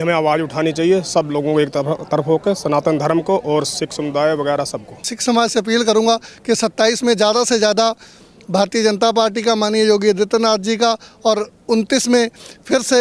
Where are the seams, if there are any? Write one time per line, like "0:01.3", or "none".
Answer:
0:05.1